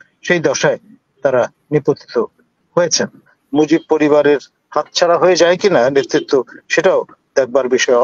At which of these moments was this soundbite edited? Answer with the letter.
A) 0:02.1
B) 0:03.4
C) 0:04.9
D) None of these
B